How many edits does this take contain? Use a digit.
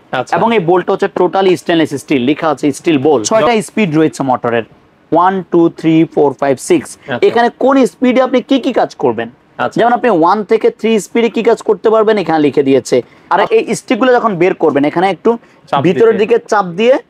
3